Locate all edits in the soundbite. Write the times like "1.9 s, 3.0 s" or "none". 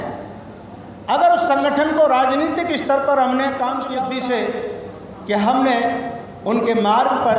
3.9 s